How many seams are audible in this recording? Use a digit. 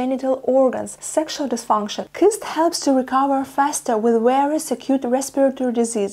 2